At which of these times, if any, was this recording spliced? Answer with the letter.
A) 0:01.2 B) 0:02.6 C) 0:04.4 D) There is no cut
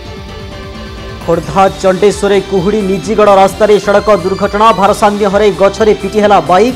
A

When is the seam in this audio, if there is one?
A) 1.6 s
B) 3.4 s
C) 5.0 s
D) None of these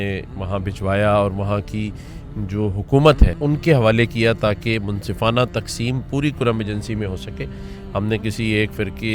B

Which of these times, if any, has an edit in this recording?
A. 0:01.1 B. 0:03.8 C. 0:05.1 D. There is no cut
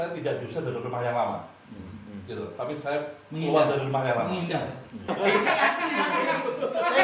C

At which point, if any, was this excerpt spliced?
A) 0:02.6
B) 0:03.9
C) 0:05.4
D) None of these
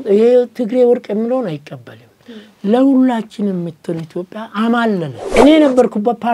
C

